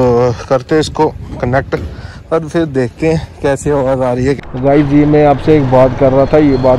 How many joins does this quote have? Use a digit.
1